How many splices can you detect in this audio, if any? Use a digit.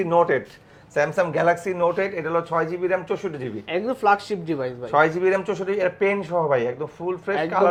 0